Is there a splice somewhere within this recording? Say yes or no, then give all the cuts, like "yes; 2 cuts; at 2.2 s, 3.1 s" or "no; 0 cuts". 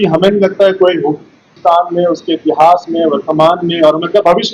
yes; 1 cut; at 1.4 s